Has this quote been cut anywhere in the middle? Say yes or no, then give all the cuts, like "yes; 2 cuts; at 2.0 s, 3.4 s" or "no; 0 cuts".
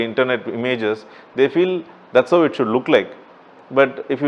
no; 0 cuts